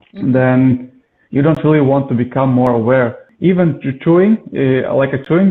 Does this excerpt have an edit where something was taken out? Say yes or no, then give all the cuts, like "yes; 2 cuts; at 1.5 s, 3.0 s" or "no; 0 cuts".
yes; 1 cut; at 3.3 s